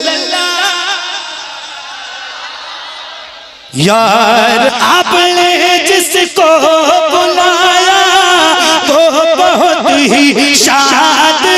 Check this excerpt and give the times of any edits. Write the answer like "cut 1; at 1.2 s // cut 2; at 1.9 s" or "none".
cut 1; at 4.7 s